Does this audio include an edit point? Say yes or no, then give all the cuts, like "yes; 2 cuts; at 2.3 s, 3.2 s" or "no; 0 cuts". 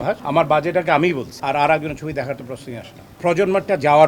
yes; 2 cuts; at 1.3 s, 3.2 s